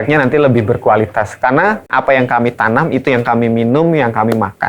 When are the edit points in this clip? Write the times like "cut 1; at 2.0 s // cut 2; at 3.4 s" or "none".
cut 1; at 1.9 s